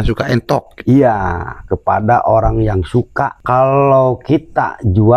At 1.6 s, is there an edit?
no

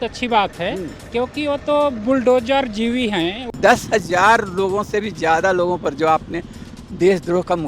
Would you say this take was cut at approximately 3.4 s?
yes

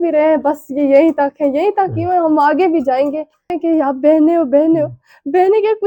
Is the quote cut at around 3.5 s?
yes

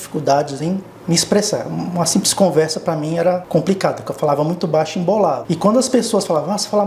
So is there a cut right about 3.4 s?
yes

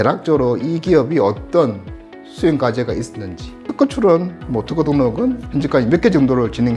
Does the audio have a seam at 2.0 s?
no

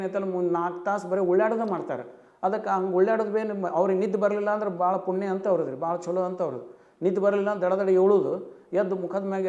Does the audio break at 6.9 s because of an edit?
no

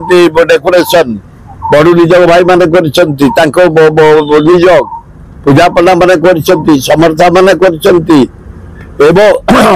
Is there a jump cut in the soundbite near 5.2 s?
no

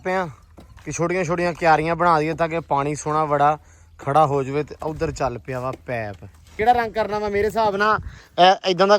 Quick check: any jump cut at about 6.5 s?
yes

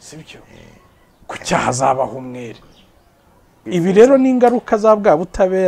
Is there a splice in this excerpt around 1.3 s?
no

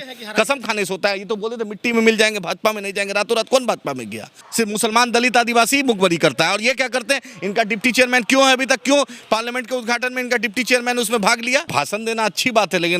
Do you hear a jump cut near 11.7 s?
yes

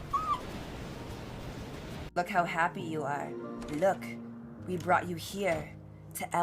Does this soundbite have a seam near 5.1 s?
yes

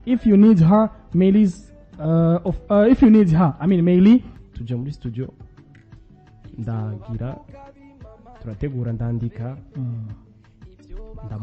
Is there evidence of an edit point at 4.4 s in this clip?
yes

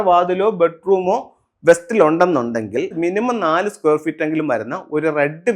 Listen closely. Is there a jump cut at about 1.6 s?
no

